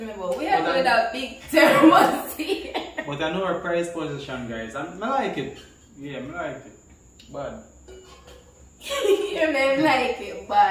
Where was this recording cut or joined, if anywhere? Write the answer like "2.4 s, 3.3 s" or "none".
none